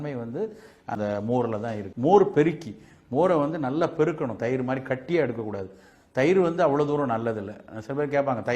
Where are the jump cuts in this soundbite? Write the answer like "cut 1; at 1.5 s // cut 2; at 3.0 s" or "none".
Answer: cut 1; at 1.9 s